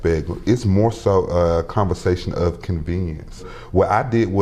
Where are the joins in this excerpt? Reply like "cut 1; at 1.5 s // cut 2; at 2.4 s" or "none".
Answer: cut 1; at 3.5 s

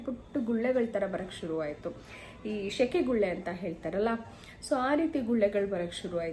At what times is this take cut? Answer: none

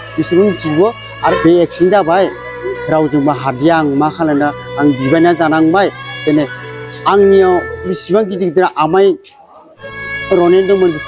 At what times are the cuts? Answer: cut 1; at 1.4 s

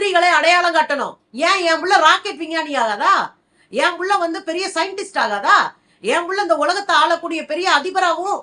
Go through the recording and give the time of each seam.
cut 1; at 1.2 s

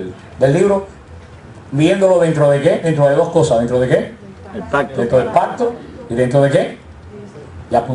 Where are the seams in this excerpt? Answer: none

